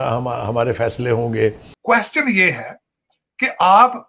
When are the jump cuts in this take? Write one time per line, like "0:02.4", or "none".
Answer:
0:01.7

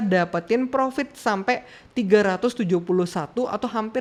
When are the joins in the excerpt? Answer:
none

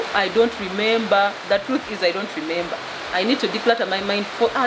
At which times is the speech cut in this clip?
none

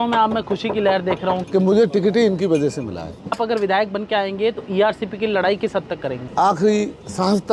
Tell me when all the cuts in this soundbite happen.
0:01.4
0:03.4
0:06.2

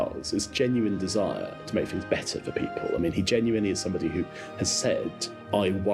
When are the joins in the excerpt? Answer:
none

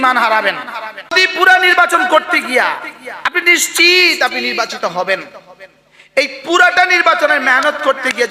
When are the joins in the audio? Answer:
0:01.1

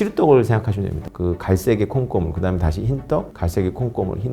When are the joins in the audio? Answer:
0:01.1

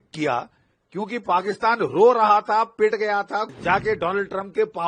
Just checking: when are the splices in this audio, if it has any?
0:03.5

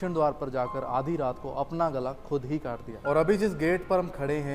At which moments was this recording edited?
0:02.9

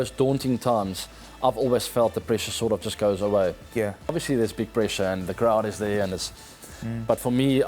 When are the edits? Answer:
0:04.1

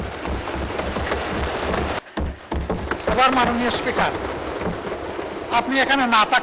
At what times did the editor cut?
0:02.0

